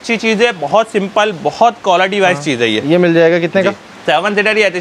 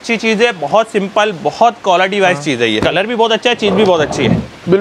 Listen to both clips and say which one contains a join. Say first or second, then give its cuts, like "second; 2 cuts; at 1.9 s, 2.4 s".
second; 1 cut; at 2.8 s